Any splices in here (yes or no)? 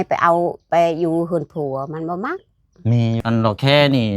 yes